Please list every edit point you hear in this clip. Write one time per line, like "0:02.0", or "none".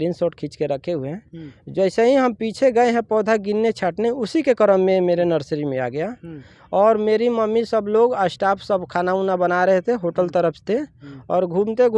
none

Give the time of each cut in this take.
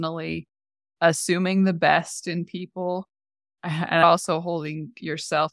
0:00.9
0:04.0

